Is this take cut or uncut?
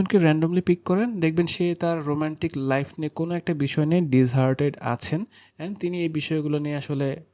uncut